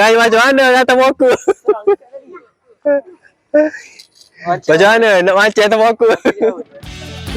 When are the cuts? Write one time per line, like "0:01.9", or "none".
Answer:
none